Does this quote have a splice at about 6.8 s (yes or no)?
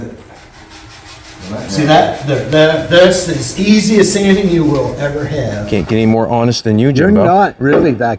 no